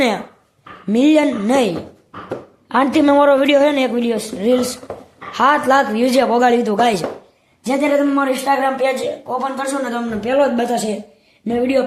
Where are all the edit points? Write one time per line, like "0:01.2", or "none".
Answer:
none